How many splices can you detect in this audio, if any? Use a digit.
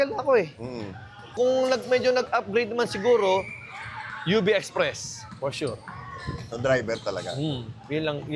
1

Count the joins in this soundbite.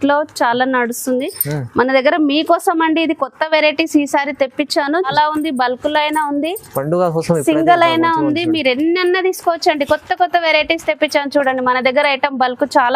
1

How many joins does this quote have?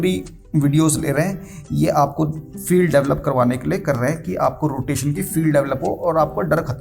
0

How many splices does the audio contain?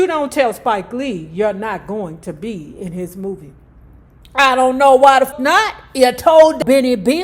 1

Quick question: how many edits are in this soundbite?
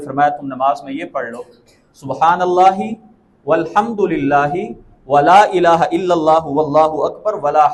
0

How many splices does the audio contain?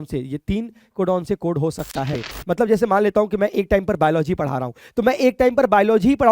1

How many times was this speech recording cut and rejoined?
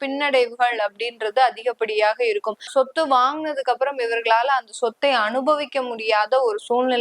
1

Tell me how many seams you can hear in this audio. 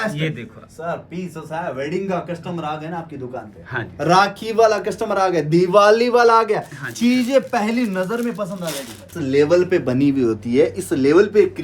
1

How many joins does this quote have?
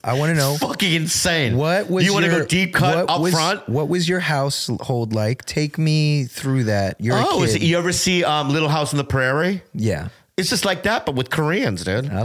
0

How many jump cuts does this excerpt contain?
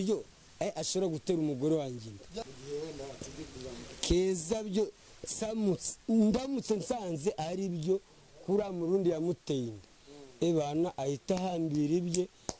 1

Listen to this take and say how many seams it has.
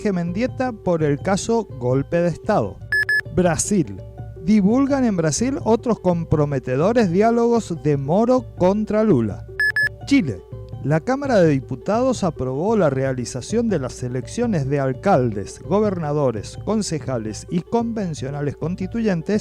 2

